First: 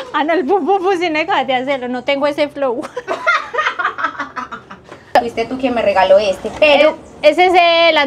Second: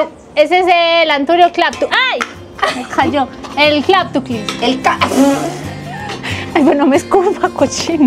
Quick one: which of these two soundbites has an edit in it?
first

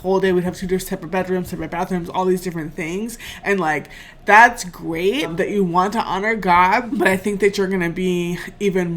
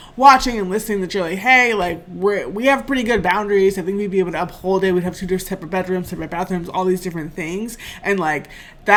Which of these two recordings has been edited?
first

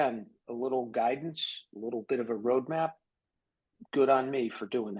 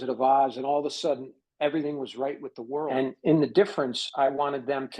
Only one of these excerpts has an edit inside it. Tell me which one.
second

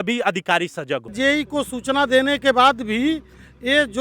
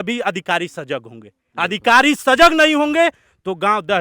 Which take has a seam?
first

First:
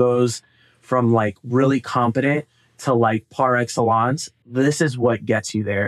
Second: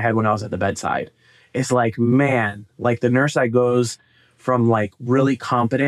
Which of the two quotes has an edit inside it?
first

